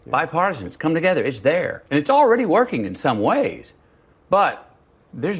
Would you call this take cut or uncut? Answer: cut